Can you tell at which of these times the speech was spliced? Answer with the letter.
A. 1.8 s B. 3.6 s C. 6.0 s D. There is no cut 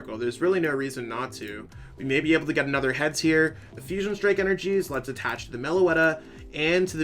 B